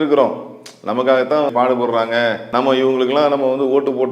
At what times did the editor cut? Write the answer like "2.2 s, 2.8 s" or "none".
2.4 s